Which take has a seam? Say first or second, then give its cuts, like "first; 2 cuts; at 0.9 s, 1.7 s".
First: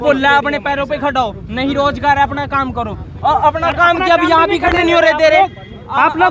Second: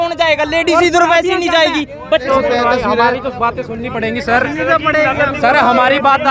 second; 1 cut; at 2.3 s